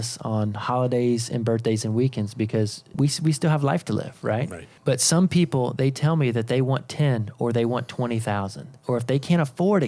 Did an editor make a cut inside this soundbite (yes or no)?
yes